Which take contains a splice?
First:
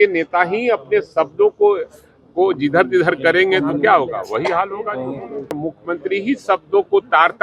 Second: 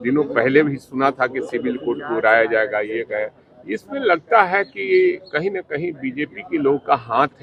first; 1 cut; at 5.6 s

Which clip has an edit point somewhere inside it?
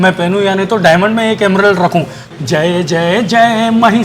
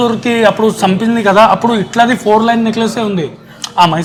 first; 1 cut; at 2.2 s

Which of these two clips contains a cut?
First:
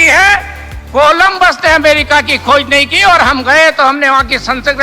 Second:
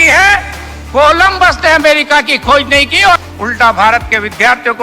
second; 1 cut; at 3.2 s

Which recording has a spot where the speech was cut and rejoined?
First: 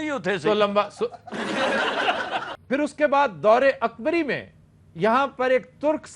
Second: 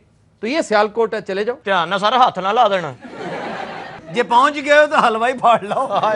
first; 1 cut; at 2.5 s

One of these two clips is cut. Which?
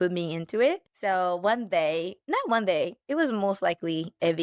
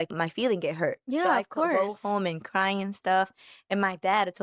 first; 3 cuts; at 0.9 s, 2.2 s, 3.0 s

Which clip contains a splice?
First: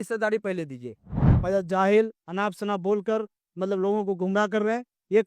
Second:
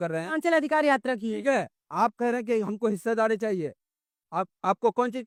first; 1 cut; at 1.0 s

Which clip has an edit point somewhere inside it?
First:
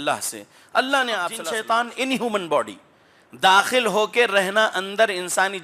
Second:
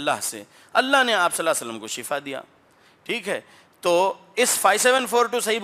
first; 1 cut; at 1.4 s

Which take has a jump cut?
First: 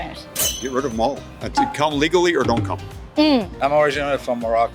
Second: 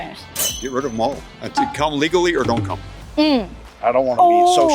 second; 1 cut; at 3.5 s

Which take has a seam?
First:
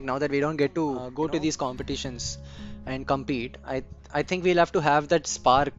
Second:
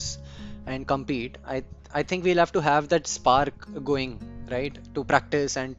first; 1 cut; at 1.1 s

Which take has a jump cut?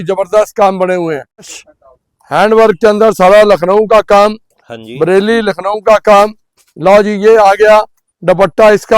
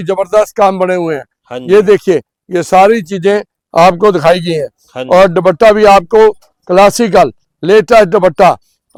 first; 1 cut; at 1.6 s

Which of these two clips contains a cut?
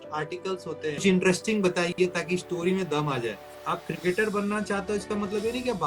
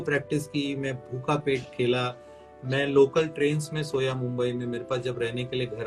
first; 2 cuts; at 1.0 s, 3.5 s

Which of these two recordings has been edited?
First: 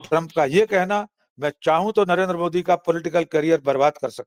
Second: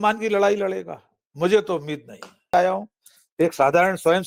second; 1 cut; at 2.5 s

